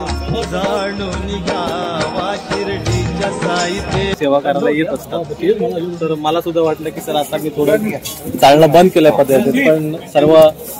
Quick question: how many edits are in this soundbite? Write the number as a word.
one